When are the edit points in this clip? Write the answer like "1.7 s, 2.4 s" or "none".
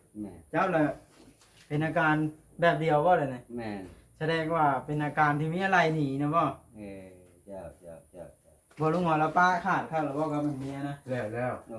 none